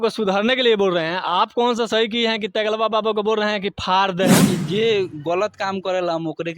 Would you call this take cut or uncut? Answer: cut